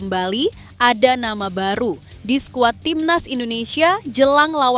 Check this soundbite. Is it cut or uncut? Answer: uncut